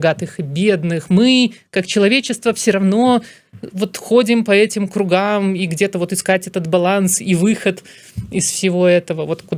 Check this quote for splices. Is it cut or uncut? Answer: uncut